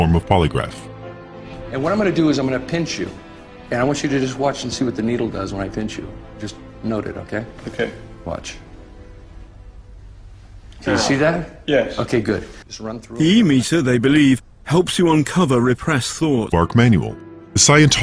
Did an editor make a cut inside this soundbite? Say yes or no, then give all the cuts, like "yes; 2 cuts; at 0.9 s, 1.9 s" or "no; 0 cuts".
no; 0 cuts